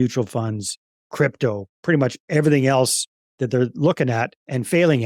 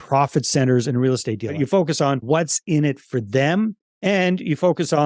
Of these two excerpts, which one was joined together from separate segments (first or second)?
second